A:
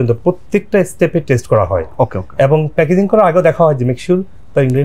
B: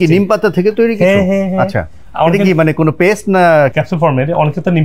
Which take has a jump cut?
B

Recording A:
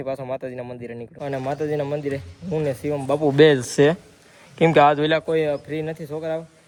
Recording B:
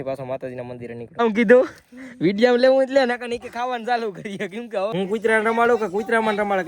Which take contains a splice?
B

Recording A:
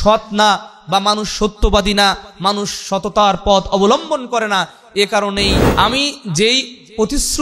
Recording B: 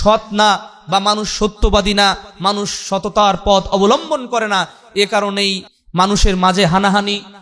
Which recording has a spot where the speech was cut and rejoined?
A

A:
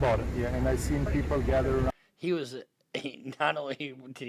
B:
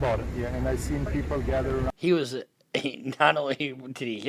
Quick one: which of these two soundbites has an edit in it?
B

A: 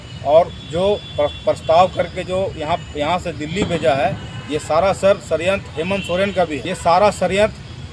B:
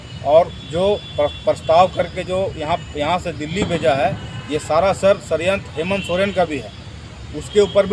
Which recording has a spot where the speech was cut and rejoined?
A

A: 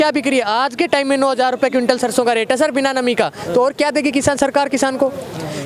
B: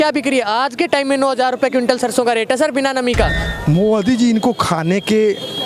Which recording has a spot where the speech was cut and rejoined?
B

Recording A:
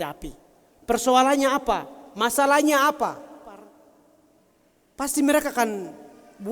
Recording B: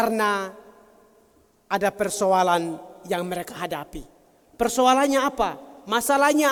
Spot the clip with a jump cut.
A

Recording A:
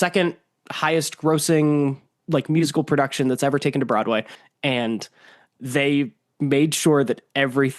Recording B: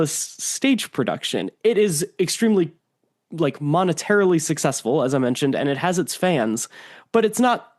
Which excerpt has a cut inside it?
A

